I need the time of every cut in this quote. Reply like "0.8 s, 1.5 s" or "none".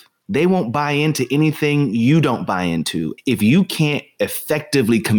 3.1 s